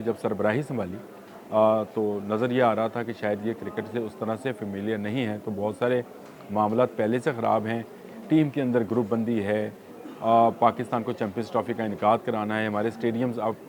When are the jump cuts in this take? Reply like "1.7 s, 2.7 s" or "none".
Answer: none